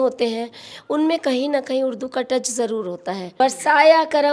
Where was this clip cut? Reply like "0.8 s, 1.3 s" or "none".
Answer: 3.3 s